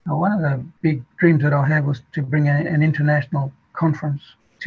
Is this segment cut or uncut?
uncut